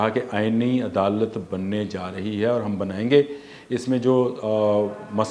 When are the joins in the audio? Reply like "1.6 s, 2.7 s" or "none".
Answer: none